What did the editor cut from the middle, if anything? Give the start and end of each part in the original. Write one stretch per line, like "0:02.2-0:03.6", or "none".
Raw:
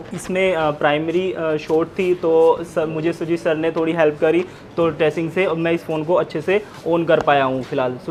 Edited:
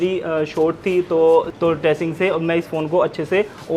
0:02.6-0:04.7